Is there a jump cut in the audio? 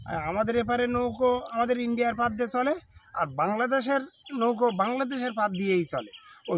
no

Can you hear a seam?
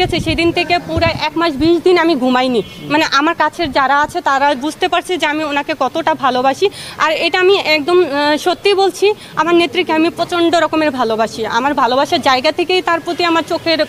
no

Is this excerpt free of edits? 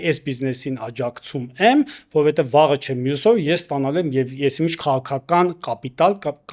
yes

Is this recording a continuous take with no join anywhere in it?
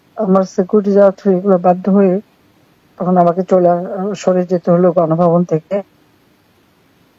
yes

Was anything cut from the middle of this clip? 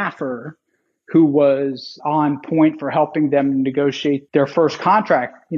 yes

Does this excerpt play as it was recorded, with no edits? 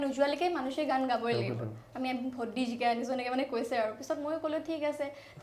yes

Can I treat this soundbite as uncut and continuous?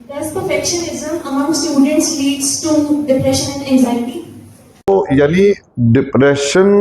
no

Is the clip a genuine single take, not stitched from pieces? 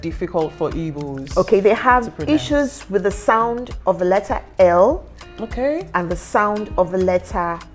yes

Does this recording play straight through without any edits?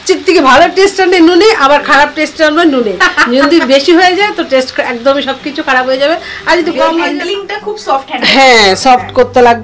no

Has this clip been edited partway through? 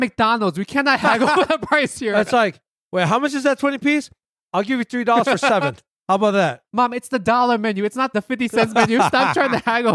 yes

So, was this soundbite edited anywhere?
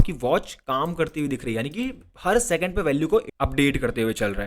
yes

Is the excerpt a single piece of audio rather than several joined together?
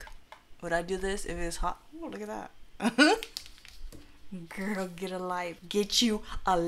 no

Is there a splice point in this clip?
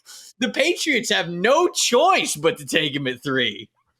no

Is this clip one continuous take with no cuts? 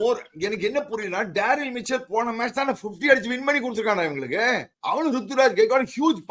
no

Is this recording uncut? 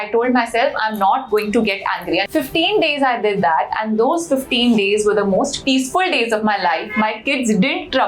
no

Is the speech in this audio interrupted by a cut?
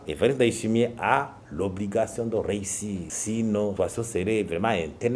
no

